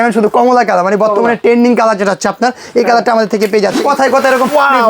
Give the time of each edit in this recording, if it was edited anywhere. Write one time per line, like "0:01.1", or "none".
0:03.8